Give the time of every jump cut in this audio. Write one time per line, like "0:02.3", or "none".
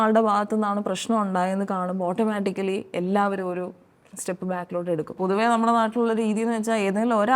0:05.1